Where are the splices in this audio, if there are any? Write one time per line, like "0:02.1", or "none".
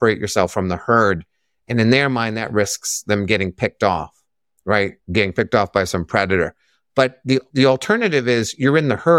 0:07.5